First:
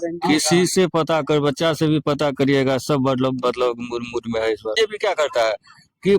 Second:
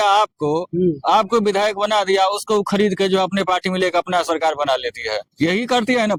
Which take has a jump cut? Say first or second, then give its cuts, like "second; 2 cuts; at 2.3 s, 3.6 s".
first; 1 cut; at 4.7 s